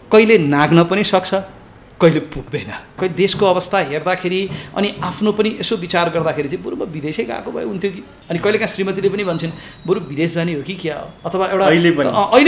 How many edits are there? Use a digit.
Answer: 2